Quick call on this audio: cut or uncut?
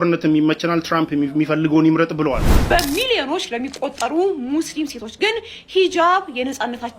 cut